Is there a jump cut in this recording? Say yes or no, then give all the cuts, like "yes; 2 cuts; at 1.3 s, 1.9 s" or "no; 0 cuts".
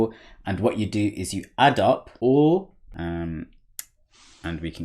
yes; 1 cut; at 2.8 s